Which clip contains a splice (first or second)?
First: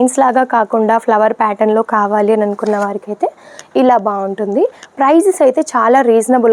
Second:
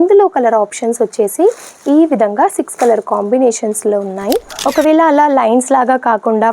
second